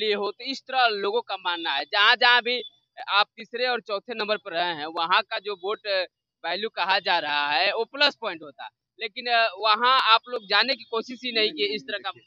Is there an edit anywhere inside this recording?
no; 0 cuts

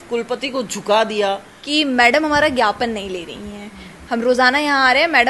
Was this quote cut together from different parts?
yes; 1 cut; at 1.5 s

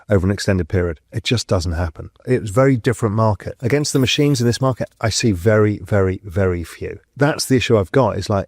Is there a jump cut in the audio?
yes; 4 cuts; at 1.1 s, 2.2 s, 3.5 s, 7.0 s

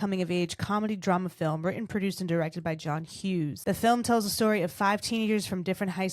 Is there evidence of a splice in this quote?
yes; 1 cut; at 3.6 s

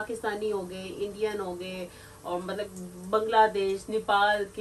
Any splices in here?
no; 0 cuts

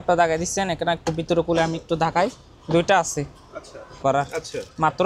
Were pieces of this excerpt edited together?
yes; 1 cut; at 4.0 s

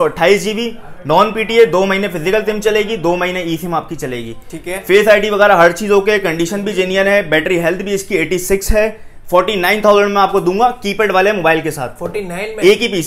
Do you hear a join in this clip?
no; 0 cuts

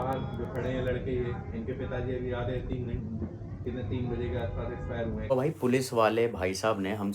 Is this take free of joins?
no; 1 cut; at 5.3 s

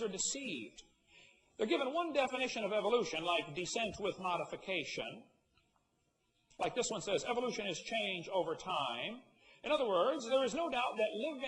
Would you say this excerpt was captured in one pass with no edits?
yes; 0 cuts

